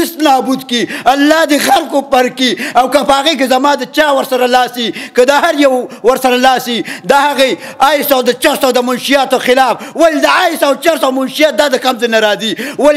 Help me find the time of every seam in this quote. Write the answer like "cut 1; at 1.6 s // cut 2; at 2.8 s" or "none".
none